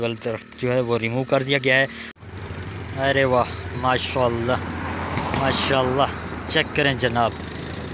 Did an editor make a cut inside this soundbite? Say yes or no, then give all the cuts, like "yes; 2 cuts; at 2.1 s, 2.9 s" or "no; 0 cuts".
yes; 1 cut; at 2.0 s